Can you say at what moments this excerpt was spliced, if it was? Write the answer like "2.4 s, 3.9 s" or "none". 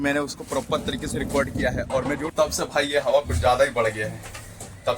2.3 s